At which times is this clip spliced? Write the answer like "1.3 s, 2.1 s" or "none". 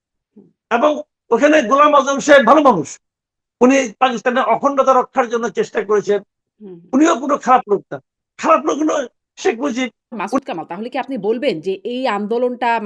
10.3 s